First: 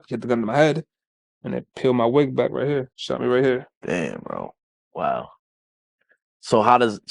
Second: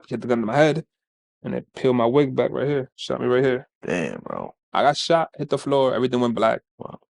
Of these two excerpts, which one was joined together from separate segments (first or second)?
second